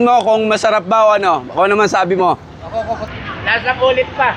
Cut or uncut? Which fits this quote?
cut